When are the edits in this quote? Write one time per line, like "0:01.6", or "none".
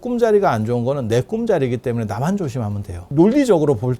0:03.1